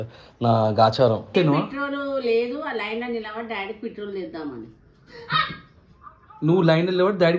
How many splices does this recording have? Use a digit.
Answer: 1